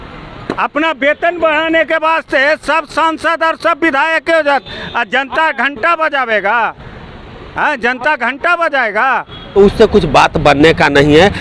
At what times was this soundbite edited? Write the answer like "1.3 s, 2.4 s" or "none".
9.4 s